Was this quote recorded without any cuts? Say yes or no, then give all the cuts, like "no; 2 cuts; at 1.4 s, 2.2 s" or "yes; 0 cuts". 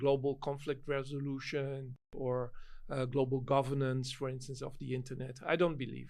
no; 1 cut; at 2.1 s